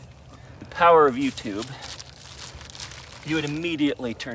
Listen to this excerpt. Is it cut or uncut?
uncut